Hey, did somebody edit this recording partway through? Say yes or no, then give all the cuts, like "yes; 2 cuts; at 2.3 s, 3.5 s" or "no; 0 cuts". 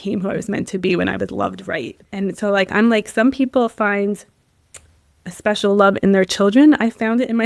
yes; 1 cut; at 2.0 s